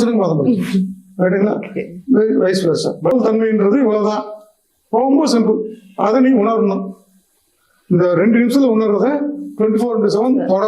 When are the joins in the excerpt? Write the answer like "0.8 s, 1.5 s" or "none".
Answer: 3.1 s